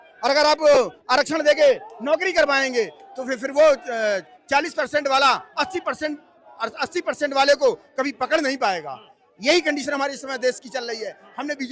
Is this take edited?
no; 0 cuts

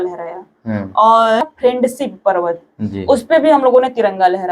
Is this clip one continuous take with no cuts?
no; 1 cut; at 1.4 s

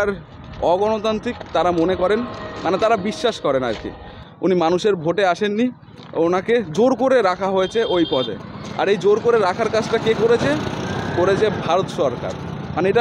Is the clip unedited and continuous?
yes; 0 cuts

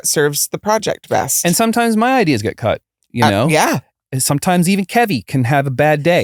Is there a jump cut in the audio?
no; 0 cuts

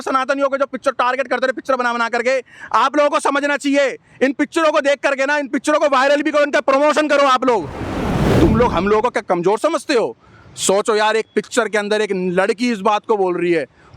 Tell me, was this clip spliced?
yes; 1 cut; at 8.0 s

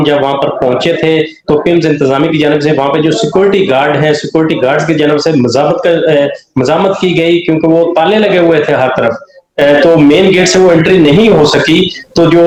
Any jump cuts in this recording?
no; 0 cuts

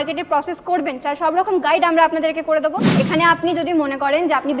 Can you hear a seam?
yes; 1 cut; at 2.9 s

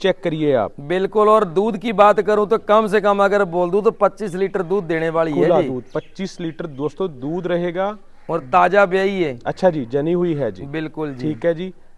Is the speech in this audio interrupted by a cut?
no; 0 cuts

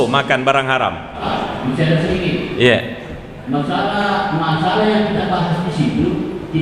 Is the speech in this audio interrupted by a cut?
yes; 1 cut; at 1.2 s

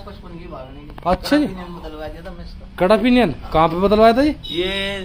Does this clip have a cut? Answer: no; 0 cuts

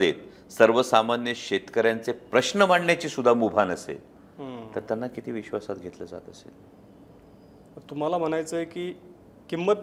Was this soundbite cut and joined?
no; 0 cuts

